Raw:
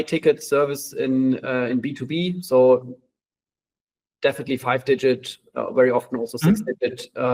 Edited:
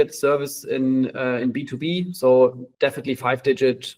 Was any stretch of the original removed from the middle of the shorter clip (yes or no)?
yes